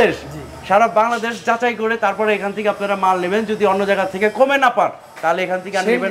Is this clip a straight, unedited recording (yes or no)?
yes